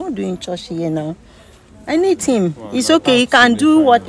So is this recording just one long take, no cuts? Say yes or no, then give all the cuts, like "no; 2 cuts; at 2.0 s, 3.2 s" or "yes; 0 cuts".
yes; 0 cuts